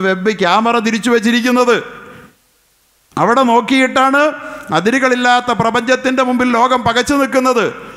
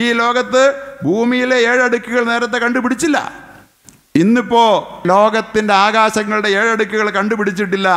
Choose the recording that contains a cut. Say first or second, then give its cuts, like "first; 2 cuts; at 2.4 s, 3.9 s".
second; 1 cut; at 5.0 s